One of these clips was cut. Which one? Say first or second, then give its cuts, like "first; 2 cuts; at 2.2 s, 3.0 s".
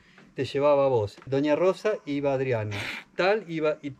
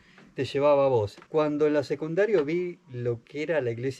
second; 1 cut; at 1.2 s